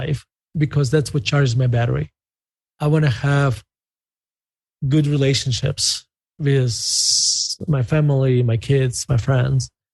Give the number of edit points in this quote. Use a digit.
0